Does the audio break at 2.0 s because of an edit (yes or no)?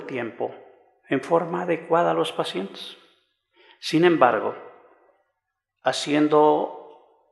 yes